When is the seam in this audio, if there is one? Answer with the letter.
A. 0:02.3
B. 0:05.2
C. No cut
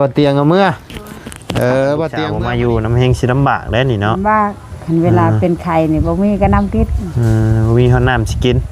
A